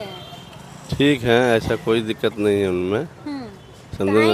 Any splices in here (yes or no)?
no